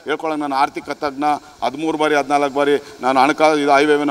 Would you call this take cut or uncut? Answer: uncut